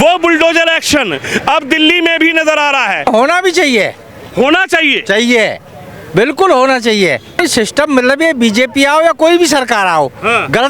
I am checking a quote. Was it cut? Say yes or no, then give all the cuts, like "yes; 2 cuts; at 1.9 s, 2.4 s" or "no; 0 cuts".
yes; 2 cuts; at 3.1 s, 7.4 s